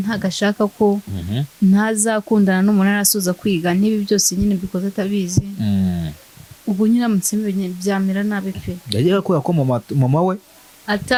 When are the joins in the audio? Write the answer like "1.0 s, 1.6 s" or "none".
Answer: none